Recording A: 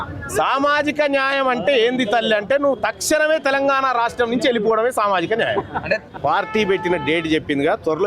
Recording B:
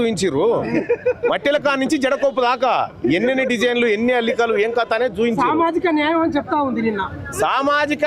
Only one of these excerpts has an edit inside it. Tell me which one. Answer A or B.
A